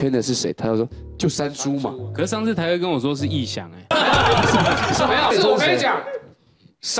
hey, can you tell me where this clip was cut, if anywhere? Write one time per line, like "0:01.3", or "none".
0:03.9
0:05.3